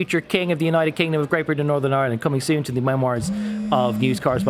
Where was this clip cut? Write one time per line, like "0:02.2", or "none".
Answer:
none